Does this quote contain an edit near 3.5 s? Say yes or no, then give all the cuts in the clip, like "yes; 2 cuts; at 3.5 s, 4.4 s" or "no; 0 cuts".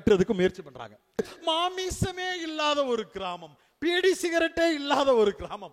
no; 1 cut; at 1.2 s